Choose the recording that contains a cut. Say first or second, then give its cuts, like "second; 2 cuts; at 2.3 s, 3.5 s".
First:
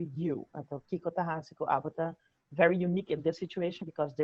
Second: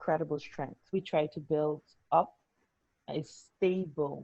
second; 1 cut; at 0.9 s